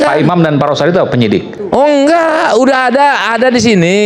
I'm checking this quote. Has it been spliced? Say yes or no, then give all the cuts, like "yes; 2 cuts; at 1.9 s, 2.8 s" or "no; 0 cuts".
yes; 1 cut; at 1.6 s